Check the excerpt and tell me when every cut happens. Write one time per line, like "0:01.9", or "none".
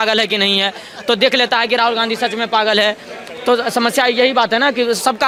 none

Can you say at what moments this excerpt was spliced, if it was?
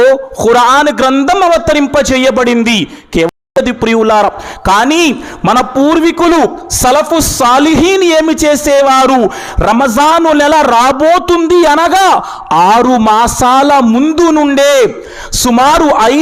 0:03.3

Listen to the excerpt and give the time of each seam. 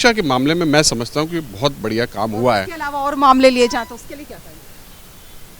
none

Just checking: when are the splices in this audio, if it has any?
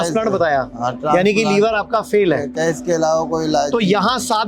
none

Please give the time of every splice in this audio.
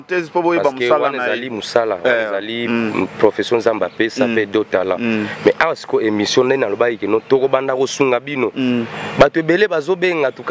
none

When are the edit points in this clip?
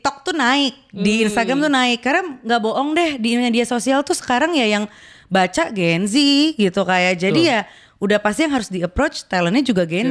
none

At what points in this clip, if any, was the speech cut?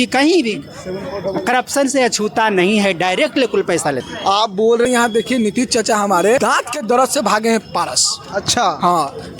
0:04.8

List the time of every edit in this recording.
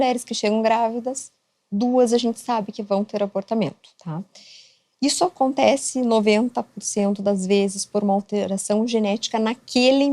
none

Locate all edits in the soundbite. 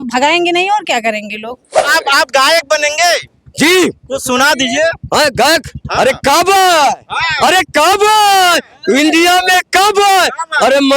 0:01.8

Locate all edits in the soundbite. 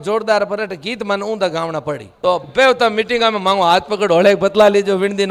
0:02.1

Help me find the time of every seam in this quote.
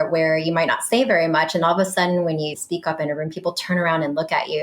0:02.6

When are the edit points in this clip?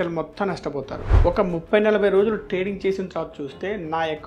0:01.1

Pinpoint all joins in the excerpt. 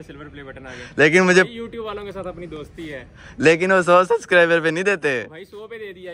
none

